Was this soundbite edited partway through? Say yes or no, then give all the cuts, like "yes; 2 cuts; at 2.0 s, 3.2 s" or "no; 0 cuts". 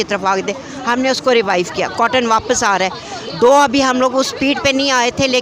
no; 0 cuts